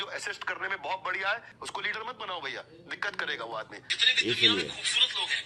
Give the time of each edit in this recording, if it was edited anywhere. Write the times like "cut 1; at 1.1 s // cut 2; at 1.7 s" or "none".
cut 1; at 1.5 s // cut 2; at 3.9 s